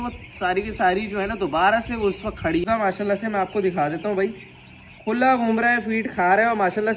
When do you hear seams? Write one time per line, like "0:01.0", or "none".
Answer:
0:02.6